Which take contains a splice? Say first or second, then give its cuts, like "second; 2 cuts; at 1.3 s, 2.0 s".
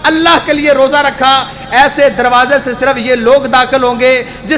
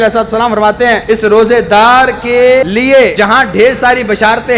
second; 2 cuts; at 1.0 s, 3.1 s